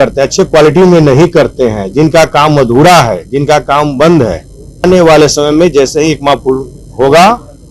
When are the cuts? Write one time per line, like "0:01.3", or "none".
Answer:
0:04.8